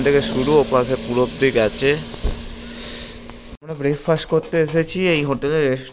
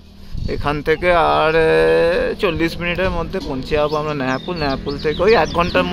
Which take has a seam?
first; 1 cut; at 3.6 s

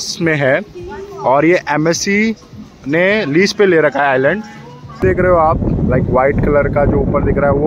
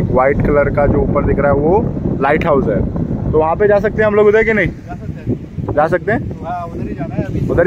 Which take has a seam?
first; 1 cut; at 5.0 s

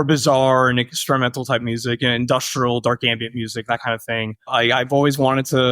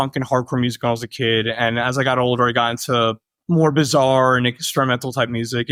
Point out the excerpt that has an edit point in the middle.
first; 1 cut; at 4.5 s

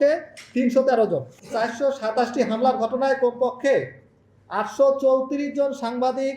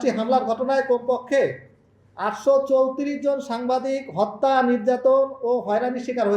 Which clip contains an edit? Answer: first; 1 cut; at 1.3 s

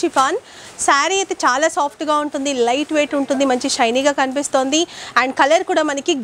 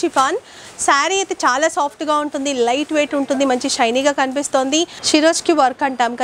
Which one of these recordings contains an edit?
second; 1 cut; at 5.0 s

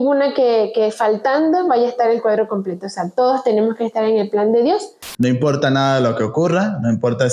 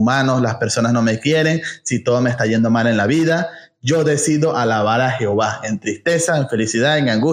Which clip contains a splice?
first; 1 cut; at 5.0 s

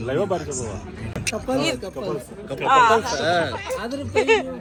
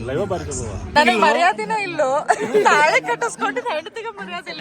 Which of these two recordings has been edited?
second; 1 cut; at 0.9 s

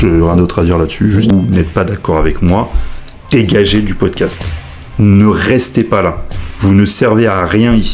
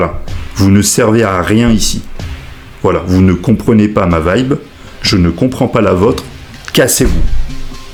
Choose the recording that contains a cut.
first; 1 cut; at 1.3 s

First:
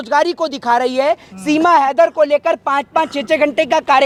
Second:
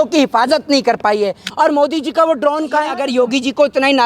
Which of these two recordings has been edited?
second; 2 cuts; at 1.4 s, 3.0 s

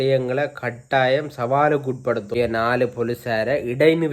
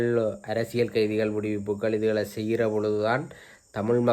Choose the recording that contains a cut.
first; 1 cut; at 2.4 s

